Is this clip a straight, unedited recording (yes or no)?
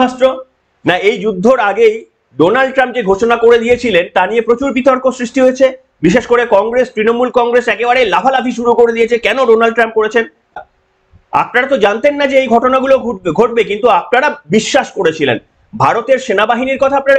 no